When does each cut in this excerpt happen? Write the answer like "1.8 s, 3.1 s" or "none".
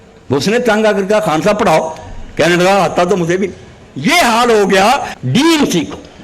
5.1 s